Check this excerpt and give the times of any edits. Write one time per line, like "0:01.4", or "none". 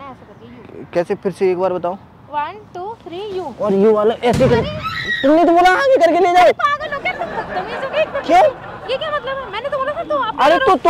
none